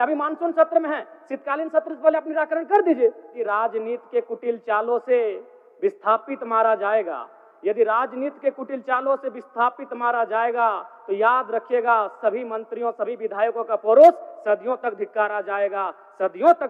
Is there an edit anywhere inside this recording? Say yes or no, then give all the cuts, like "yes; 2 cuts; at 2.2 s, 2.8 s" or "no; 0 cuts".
yes; 1 cut; at 3.4 s